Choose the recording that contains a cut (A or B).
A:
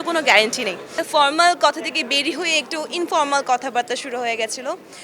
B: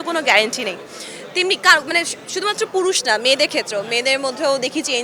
A